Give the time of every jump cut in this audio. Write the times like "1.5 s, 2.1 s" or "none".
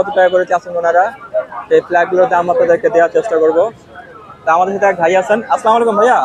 none